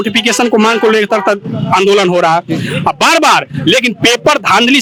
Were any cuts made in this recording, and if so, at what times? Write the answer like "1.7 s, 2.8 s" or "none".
none